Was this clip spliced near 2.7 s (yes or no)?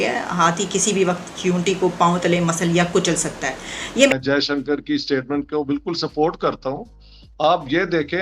no